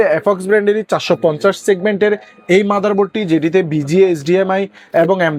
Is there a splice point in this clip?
no; 0 cuts

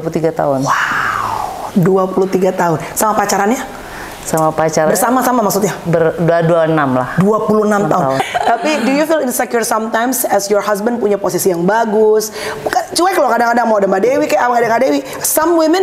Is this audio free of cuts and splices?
no; 1 cut; at 8.2 s

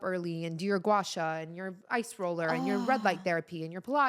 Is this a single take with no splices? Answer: yes; 0 cuts

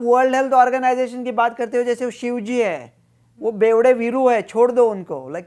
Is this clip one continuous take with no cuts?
yes; 0 cuts

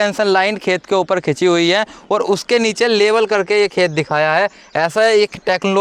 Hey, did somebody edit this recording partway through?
no; 0 cuts

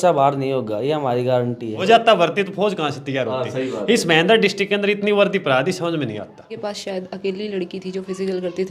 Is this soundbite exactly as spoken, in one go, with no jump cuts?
no; 2 cuts; at 1.9 s, 6.5 s

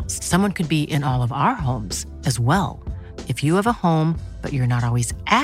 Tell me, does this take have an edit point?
no; 0 cuts

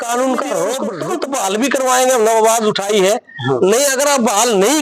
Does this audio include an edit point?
yes; 1 cut; at 0.9 s

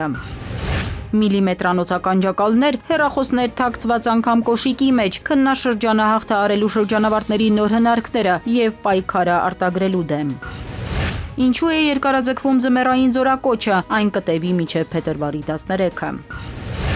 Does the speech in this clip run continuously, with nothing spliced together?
no; 1 cut; at 11.1 s

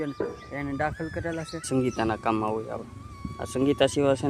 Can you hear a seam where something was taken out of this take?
yes; 1 cut; at 1.7 s

